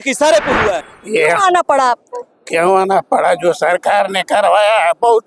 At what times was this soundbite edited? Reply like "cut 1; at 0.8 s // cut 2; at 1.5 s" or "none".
cut 1; at 0.9 s

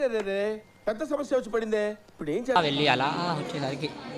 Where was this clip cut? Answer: cut 1; at 2.6 s

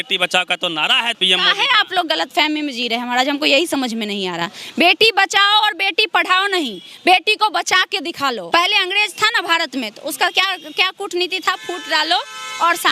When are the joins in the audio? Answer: cut 1; at 1.2 s // cut 2; at 8.4 s

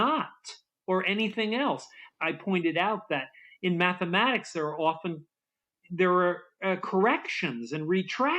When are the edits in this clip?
cut 1; at 2.0 s

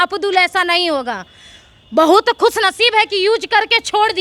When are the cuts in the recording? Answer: none

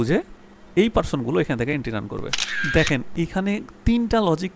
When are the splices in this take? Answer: cut 1; at 2.6 s

